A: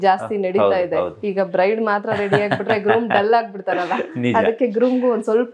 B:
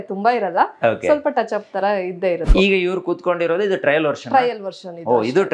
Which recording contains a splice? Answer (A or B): B